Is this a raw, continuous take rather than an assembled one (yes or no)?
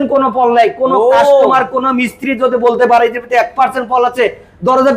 yes